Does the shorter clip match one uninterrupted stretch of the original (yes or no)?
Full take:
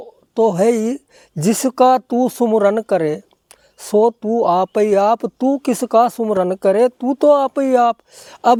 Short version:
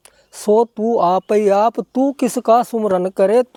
yes